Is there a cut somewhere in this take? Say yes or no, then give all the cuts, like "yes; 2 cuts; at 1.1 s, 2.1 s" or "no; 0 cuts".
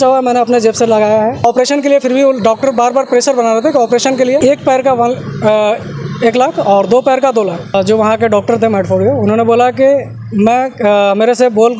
yes; 3 cuts; at 1.4 s, 4.4 s, 7.7 s